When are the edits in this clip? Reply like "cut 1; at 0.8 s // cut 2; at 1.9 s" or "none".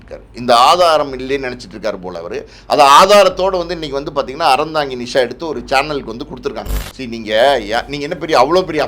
cut 1; at 6.7 s